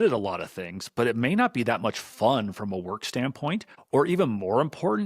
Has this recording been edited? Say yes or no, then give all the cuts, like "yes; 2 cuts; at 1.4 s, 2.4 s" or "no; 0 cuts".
yes; 1 cut; at 3.7 s